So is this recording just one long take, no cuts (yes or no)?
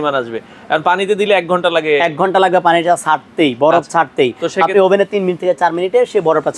yes